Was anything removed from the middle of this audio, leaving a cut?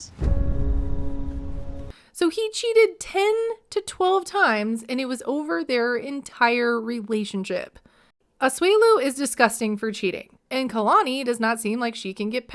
no; 0 cuts

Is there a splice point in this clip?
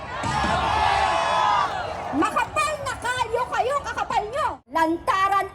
yes; 1 cut; at 4.6 s

